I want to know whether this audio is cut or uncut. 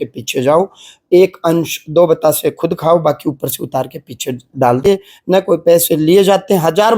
cut